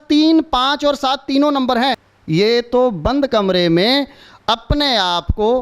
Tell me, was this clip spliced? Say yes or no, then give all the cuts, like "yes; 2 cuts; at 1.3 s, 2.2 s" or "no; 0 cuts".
yes; 1 cut; at 2.1 s